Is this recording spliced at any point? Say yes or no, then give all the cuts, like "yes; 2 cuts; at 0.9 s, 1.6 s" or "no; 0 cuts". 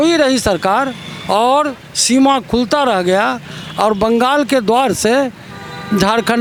no; 0 cuts